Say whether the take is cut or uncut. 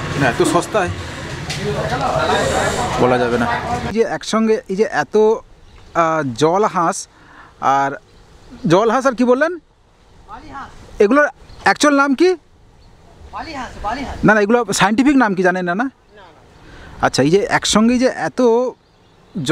cut